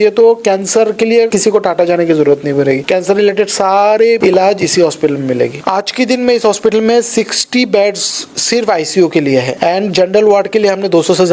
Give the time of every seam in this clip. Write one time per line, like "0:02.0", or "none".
0:01.3
0:02.8
0:04.2
0:05.6
0:09.5